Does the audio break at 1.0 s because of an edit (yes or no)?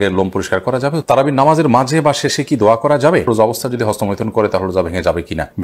yes